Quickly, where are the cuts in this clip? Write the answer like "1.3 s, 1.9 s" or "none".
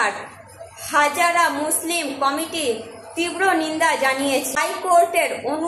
4.8 s